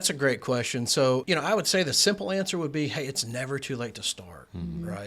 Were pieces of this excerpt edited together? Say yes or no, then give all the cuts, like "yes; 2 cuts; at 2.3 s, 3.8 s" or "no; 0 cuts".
yes; 1 cut; at 1.2 s